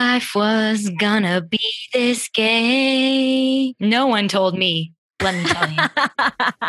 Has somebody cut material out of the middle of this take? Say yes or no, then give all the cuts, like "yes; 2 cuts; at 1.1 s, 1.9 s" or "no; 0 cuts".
yes; 1 cut; at 5.4 s